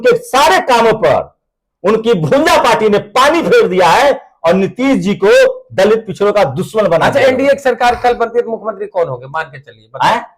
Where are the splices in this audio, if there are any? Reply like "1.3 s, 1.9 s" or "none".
none

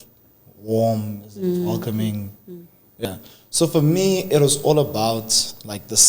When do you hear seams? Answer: 3.0 s

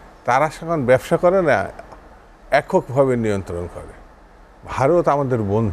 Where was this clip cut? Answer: none

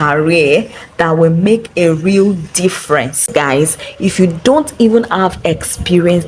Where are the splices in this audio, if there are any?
3.2 s

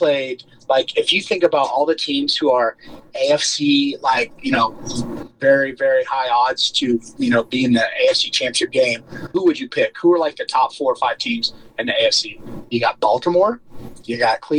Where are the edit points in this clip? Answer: 9.3 s, 12.5 s

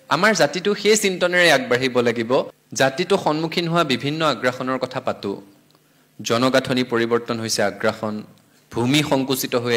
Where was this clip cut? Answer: 2.6 s

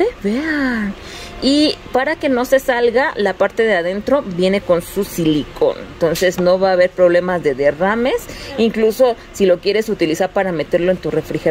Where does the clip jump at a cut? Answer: none

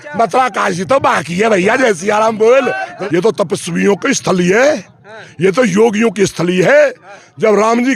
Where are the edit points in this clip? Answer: 2.9 s

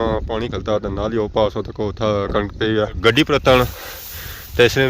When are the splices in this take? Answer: 3.0 s

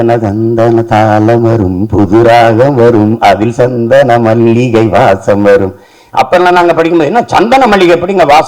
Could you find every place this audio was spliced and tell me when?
none

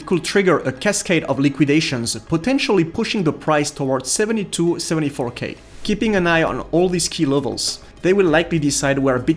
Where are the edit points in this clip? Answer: 5.6 s

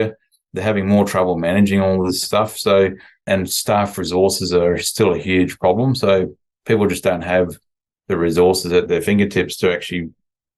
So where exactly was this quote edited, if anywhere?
2.2 s, 3.2 s, 8.9 s

